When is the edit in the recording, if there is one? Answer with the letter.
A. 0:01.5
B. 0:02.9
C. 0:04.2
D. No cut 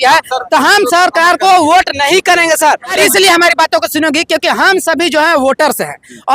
B